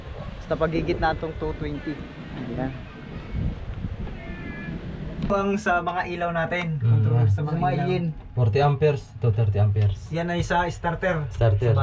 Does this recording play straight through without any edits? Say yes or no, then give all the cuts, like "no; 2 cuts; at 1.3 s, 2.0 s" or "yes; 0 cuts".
no; 1 cut; at 5.3 s